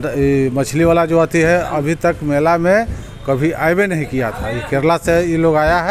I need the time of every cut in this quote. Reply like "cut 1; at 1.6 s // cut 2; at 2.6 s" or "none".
none